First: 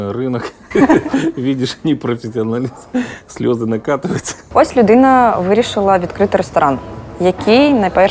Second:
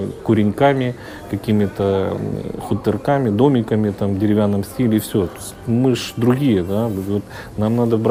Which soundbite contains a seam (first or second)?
first